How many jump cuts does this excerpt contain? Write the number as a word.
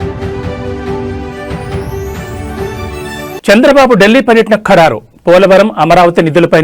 one